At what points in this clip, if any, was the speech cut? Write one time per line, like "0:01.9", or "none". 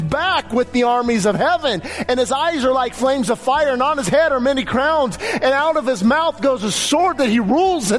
none